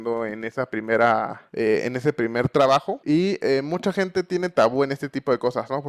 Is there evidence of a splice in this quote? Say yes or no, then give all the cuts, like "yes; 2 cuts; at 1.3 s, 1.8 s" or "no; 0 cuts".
yes; 2 cuts; at 1.4 s, 2.9 s